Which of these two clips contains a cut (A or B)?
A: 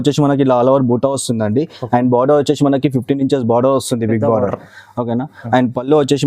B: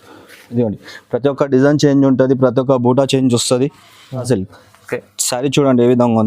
B